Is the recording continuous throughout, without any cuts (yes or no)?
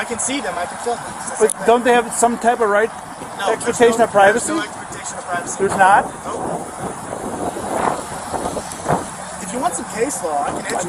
yes